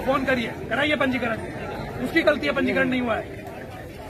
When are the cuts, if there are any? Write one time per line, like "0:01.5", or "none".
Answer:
none